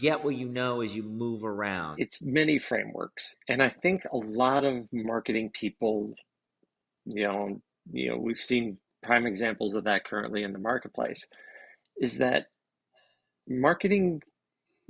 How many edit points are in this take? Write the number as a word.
one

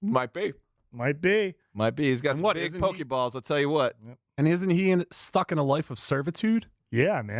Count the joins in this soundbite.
zero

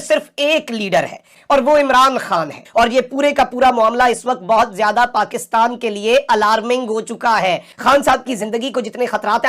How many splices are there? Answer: two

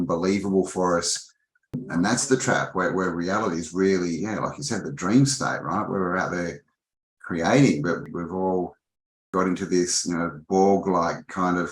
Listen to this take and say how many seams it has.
three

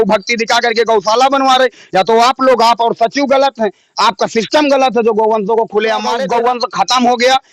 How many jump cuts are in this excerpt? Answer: one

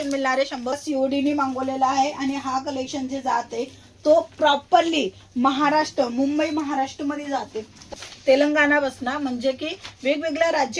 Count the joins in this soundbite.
two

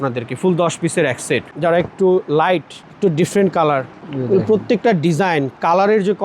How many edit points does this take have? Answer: two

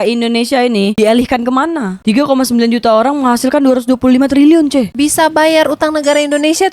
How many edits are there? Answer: one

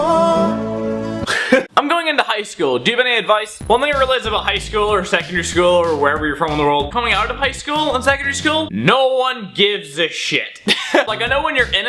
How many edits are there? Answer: one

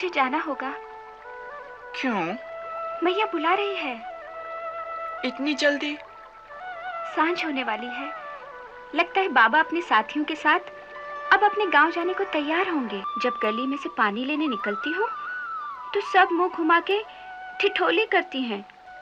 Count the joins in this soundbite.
one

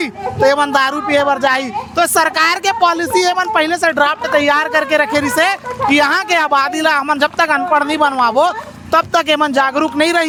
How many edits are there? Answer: zero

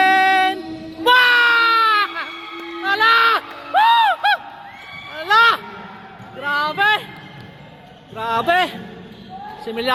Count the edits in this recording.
zero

